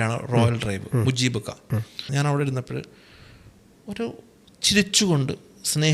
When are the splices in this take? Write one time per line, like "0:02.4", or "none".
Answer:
0:02.0